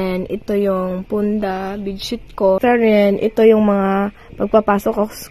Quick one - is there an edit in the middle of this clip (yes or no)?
yes